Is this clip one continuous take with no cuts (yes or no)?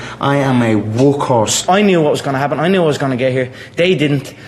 no